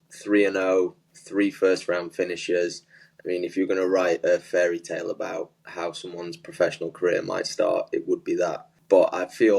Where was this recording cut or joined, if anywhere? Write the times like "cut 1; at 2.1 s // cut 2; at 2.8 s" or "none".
cut 1; at 8.7 s